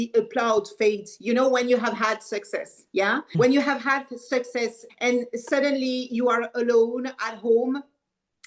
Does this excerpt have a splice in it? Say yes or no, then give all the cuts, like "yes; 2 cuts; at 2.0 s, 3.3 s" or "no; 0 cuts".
yes; 2 cuts; at 3.3 s, 4.8 s